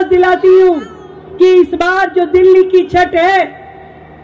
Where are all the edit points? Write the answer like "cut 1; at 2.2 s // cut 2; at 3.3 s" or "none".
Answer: none

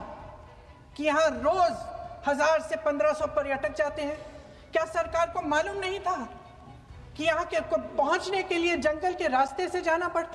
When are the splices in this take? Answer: none

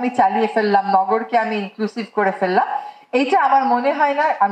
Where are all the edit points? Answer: none

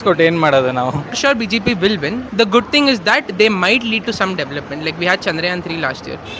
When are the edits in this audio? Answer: cut 1; at 1.2 s

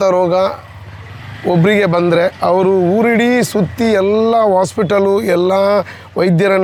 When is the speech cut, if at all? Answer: none

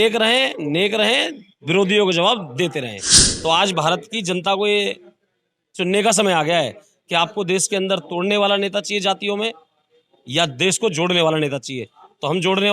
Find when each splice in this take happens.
cut 1; at 3.0 s

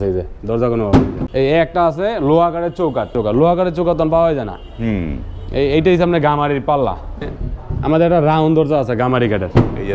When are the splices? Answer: cut 1; at 1.2 s // cut 2; at 3.1 s // cut 3; at 7.4 s

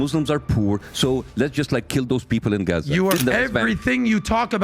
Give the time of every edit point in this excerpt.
cut 1; at 3.2 s

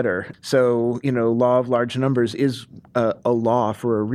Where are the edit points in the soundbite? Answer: none

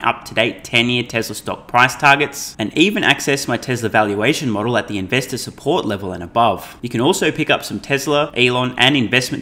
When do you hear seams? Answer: cut 1; at 6.8 s // cut 2; at 8.3 s

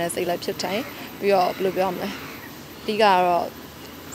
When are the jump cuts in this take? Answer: none

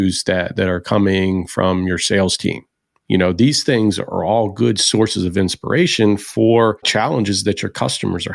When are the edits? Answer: cut 1; at 6.9 s

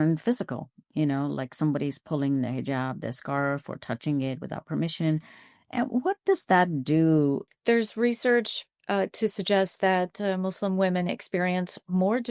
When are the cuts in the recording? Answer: none

